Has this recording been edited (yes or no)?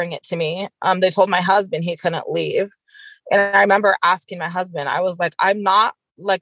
no